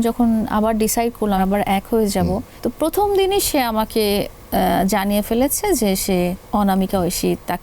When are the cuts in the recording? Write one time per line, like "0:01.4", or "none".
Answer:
0:01.4
0:02.5
0:06.4